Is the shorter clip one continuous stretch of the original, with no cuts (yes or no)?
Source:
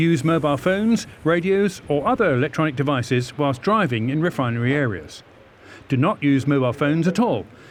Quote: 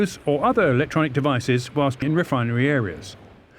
no